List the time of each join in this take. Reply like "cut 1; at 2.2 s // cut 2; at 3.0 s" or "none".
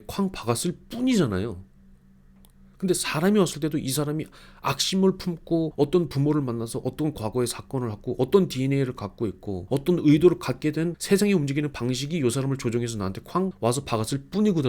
cut 1; at 5.7 s // cut 2; at 9.5 s // cut 3; at 11.0 s